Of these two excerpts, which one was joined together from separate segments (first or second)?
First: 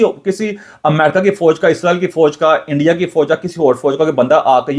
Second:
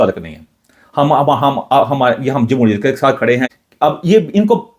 second